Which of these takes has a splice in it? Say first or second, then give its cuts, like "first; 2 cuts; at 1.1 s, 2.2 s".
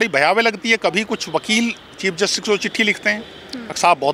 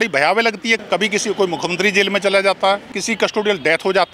second; 2 cuts; at 0.8 s, 3.0 s